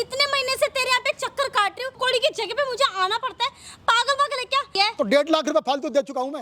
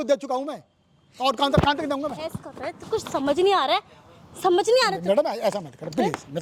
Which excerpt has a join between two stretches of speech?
first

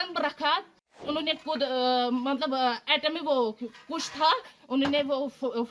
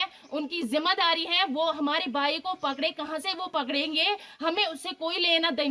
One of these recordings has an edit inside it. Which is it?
first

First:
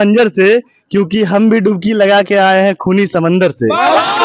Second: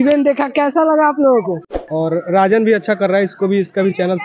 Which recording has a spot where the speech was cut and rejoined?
second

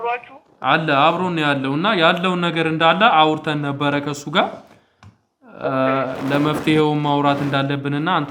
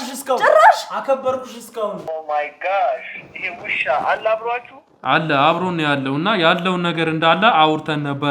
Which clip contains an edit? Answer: second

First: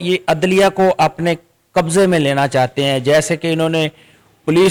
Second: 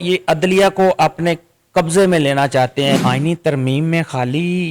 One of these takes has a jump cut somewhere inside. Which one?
second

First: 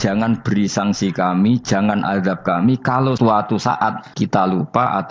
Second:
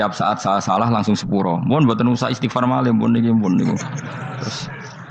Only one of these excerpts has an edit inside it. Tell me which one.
first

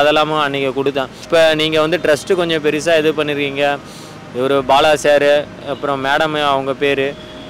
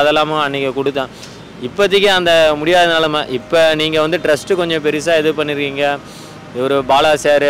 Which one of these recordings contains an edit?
first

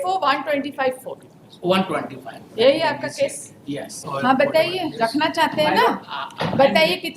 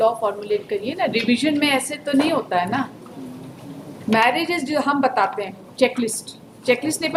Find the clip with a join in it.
first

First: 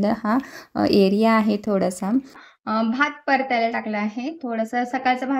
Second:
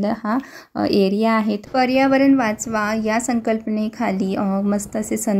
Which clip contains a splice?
second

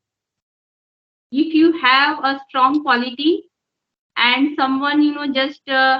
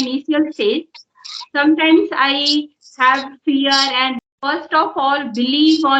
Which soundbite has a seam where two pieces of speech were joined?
second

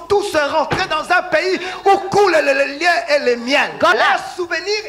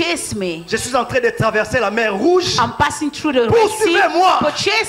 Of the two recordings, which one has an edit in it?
first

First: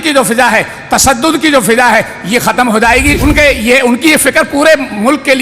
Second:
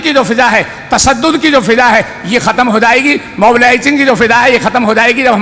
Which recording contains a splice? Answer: first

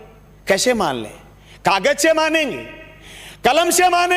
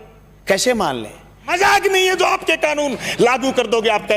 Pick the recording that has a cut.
second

